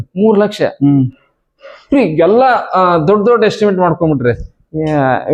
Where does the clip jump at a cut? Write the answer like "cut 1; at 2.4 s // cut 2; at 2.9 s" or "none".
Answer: none